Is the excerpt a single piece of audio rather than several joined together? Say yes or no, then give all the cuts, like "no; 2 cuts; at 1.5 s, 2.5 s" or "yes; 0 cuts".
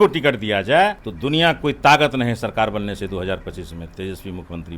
no; 1 cut; at 1.1 s